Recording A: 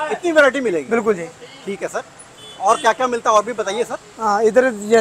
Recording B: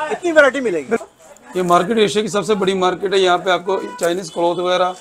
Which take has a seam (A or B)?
B